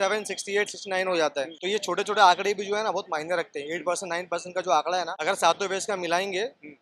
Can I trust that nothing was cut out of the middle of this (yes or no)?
no